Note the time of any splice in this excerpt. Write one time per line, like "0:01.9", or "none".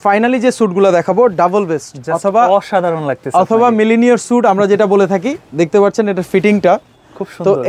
none